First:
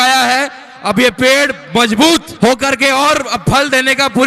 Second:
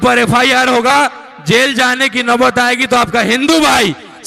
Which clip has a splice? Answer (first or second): first